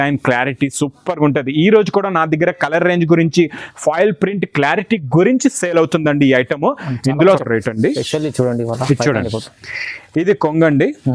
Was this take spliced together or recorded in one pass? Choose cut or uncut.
cut